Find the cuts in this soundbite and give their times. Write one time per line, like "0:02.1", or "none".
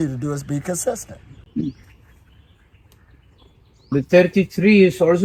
none